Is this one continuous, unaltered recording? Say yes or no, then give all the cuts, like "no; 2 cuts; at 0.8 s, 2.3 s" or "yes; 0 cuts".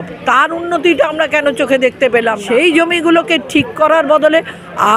no; 1 cut; at 2.4 s